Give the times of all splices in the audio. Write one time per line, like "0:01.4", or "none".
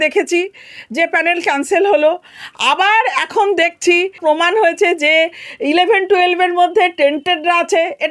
0:04.2